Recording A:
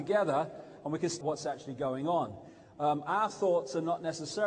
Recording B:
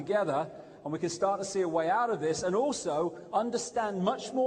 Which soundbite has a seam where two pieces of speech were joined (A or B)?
B